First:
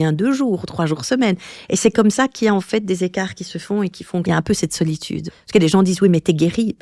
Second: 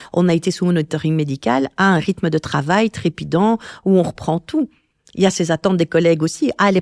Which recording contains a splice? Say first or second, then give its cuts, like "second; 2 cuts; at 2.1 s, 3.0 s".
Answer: first; 2 cuts; at 4.2 s, 5.4 s